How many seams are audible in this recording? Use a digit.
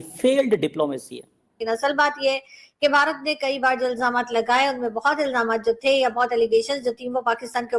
1